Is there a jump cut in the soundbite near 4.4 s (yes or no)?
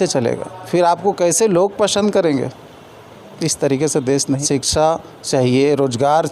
yes